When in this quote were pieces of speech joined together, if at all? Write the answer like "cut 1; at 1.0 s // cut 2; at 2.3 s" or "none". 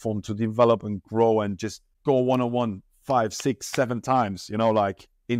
cut 1; at 1.9 s

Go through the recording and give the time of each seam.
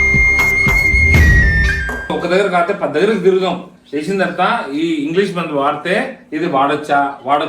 cut 1; at 2.1 s

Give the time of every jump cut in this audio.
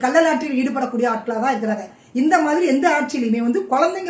cut 1; at 2.0 s

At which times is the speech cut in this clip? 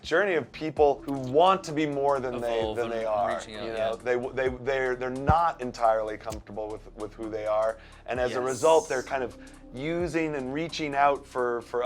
cut 1; at 1.1 s

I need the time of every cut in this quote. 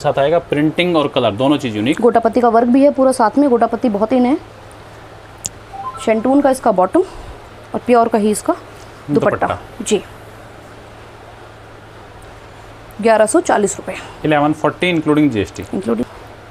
none

